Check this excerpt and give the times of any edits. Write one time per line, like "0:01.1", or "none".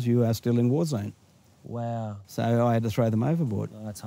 none